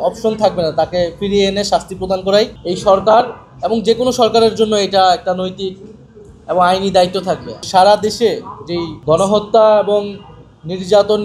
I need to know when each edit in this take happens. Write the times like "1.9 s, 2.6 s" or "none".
2.6 s, 7.5 s, 8.9 s

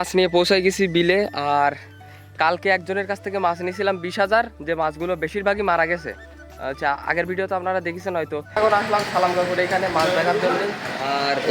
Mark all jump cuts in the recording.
8.6 s

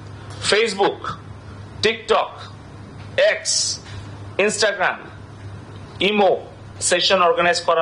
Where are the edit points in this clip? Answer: 6.7 s

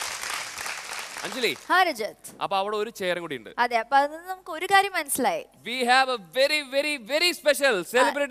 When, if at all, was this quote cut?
1.1 s

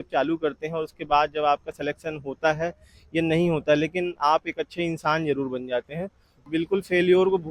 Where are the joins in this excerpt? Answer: 6.4 s

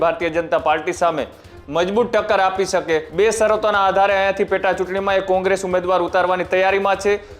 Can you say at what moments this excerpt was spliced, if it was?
3.1 s

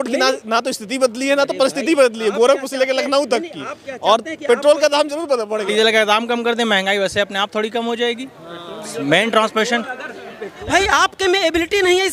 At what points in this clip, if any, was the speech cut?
5.7 s, 10.5 s

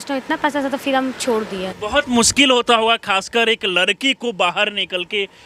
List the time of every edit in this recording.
1.7 s

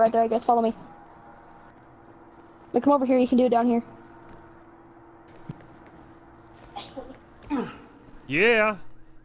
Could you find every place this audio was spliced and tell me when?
5.3 s

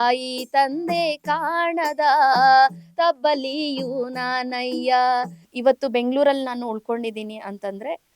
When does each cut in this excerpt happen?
5.4 s

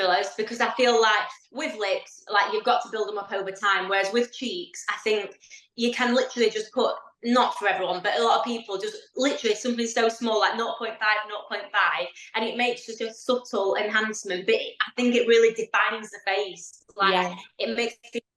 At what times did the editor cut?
none

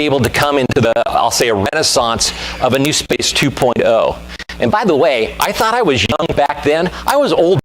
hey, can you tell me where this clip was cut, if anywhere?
none

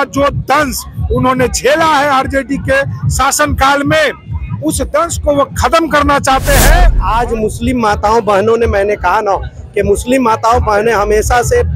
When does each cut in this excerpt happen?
7.0 s

